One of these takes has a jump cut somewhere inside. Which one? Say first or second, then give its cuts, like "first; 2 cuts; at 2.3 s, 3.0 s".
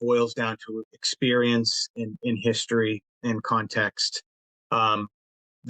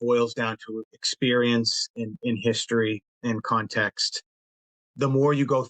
second; 1 cut; at 4.5 s